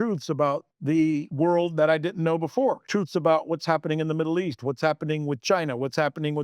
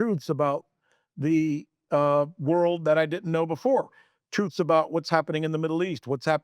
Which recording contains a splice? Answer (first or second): first